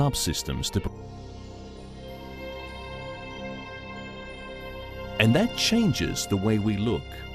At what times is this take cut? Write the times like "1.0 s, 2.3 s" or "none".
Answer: none